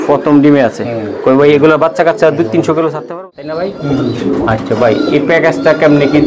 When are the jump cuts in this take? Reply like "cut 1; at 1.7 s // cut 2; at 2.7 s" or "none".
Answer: cut 1; at 3.1 s